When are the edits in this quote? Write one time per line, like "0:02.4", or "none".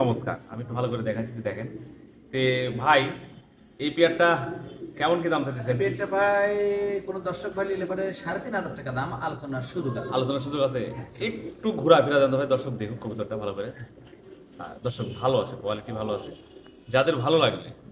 none